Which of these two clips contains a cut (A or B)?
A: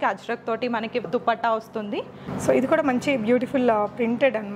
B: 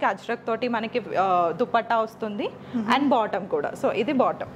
A